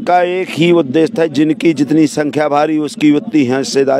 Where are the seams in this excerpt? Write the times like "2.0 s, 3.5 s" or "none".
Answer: none